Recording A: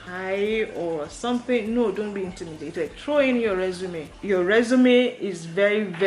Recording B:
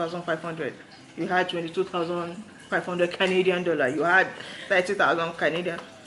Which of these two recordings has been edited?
A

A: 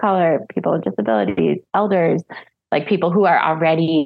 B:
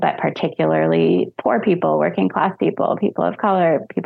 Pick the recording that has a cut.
A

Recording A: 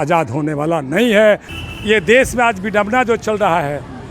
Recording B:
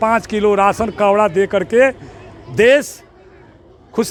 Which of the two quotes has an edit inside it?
A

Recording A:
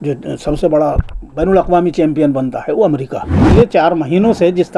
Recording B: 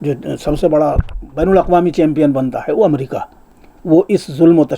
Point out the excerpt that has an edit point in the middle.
A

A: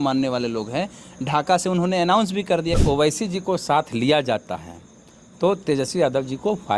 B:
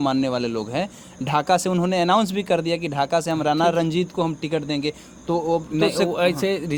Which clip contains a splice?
A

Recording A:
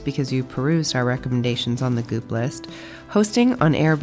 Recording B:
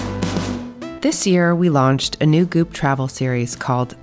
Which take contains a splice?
B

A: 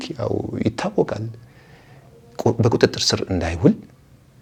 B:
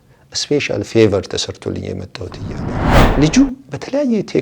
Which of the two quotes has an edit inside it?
B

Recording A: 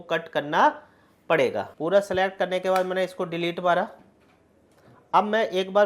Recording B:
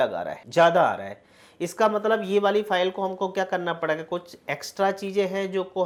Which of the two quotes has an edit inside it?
A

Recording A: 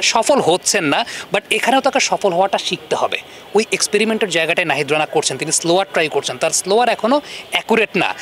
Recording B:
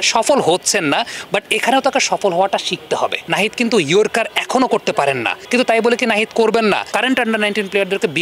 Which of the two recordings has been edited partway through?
B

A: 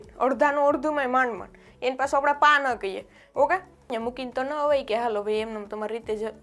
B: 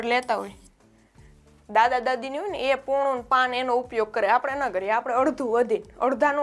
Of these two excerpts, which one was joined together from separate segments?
A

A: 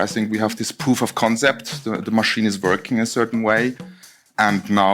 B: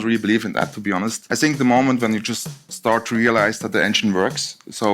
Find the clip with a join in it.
B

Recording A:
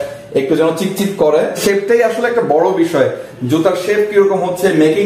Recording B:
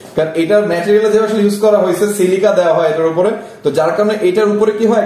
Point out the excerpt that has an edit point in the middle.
A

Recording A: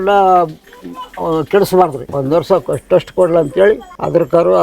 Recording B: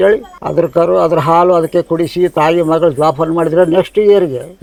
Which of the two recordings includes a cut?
A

